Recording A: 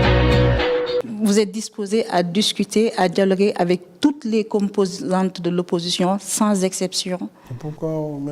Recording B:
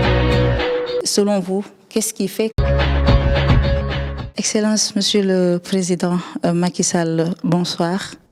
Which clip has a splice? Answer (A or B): A